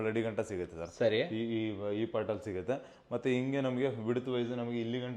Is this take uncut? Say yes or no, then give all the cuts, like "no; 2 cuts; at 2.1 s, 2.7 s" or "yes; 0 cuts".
yes; 0 cuts